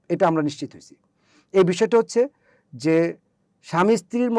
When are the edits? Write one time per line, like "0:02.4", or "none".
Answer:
none